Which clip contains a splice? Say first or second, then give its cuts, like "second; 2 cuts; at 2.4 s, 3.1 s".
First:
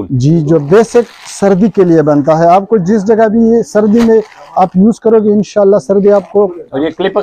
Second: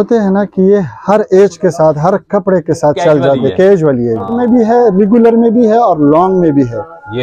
second; 1 cut; at 4.3 s